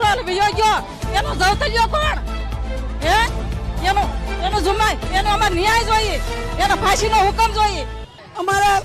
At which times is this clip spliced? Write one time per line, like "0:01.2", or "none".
none